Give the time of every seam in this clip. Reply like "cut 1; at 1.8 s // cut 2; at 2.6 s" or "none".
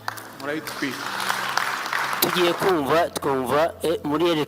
cut 1; at 2.2 s